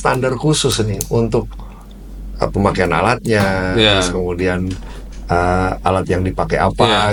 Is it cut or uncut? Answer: uncut